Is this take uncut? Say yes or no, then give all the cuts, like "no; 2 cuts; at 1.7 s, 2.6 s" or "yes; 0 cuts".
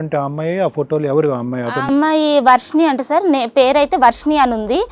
yes; 0 cuts